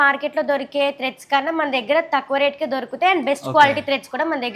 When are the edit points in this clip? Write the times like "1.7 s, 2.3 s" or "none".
none